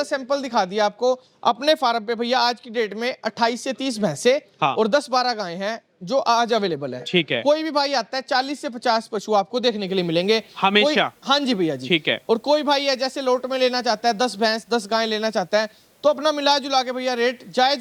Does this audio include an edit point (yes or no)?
no